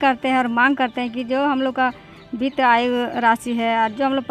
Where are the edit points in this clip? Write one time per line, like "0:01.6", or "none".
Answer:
none